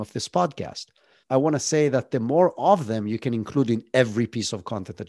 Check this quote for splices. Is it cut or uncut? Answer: cut